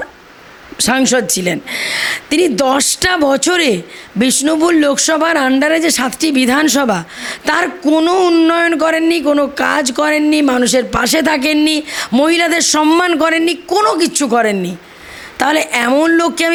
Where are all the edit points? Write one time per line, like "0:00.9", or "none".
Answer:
none